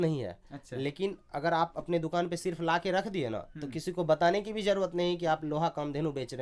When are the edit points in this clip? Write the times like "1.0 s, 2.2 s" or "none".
none